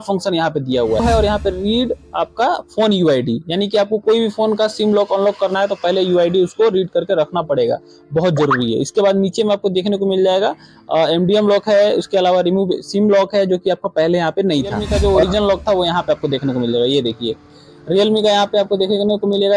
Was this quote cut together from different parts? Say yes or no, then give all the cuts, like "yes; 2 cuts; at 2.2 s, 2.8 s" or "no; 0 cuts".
yes; 2 cuts; at 1.0 s, 14.8 s